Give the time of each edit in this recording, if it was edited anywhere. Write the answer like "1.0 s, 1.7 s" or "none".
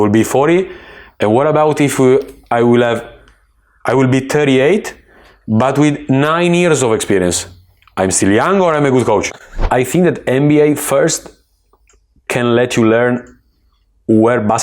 9.6 s